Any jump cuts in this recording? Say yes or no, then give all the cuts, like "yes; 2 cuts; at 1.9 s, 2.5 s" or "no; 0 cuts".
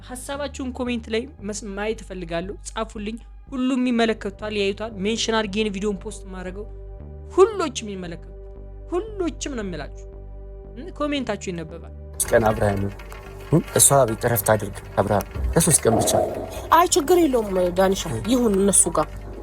yes; 1 cut; at 12.1 s